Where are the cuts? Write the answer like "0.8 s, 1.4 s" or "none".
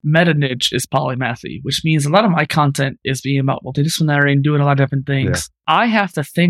5.5 s